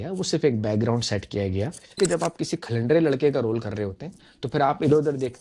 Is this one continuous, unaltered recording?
no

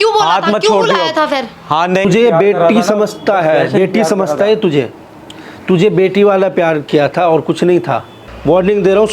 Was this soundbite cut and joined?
yes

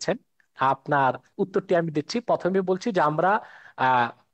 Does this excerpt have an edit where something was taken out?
no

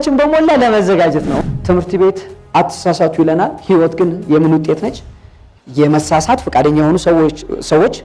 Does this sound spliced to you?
yes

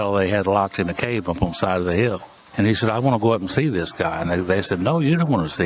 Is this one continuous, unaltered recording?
no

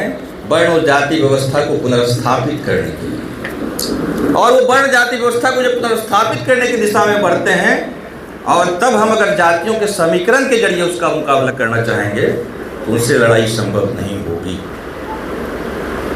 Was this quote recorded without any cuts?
yes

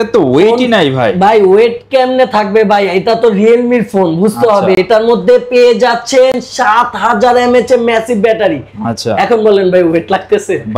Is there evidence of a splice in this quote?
no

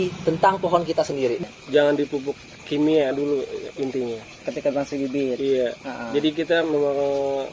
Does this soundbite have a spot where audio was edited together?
yes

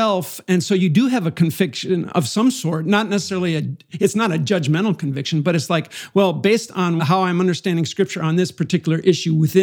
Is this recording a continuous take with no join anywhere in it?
no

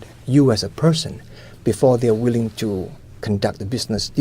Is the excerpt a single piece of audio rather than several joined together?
no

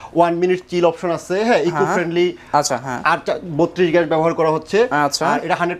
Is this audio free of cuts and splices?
yes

